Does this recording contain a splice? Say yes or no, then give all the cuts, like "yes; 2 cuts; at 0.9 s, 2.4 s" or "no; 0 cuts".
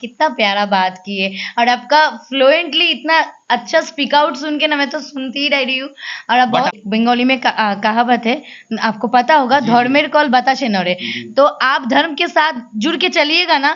yes; 1 cut; at 6.8 s